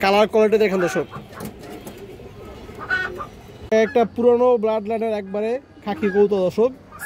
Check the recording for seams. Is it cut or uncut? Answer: uncut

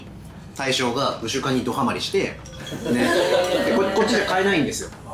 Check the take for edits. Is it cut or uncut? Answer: uncut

